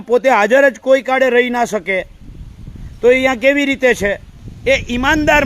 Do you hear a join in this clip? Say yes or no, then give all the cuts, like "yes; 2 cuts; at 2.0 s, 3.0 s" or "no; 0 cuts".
yes; 1 cut; at 4.4 s